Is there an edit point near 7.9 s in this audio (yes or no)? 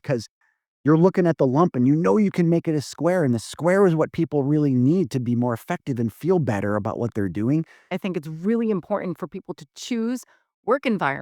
yes